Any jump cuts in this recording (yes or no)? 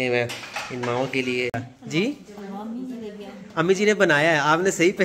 yes